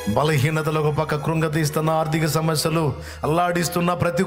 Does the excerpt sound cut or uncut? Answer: uncut